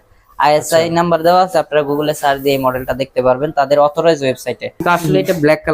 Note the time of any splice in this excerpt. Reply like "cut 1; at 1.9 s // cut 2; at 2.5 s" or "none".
cut 1; at 4.7 s